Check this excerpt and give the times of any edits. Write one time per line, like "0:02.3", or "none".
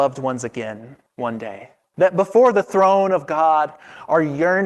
0:01.0
0:01.8